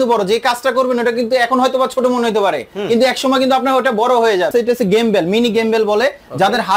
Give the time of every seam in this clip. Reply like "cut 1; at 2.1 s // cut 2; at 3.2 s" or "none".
cut 1; at 4.5 s